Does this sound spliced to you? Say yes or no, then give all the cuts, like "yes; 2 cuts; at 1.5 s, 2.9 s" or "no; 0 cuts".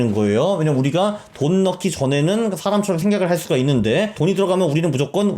yes; 1 cut; at 4.1 s